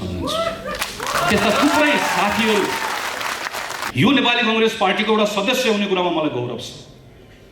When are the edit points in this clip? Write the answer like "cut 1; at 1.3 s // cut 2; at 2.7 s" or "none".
cut 1; at 3.7 s

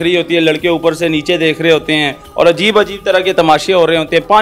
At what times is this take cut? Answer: cut 1; at 2.2 s

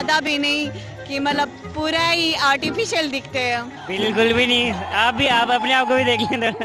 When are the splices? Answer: none

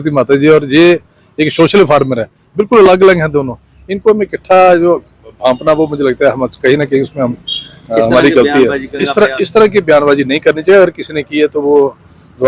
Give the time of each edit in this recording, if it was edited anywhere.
cut 1; at 9.0 s

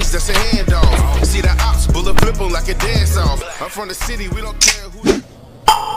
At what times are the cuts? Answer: cut 1; at 4.6 s

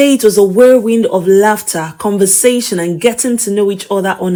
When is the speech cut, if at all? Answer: none

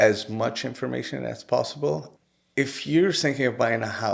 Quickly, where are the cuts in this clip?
cut 1; at 2.1 s

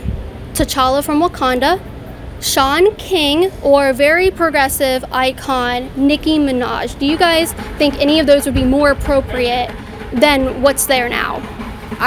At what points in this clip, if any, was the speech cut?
none

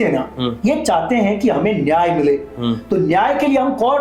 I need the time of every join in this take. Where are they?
none

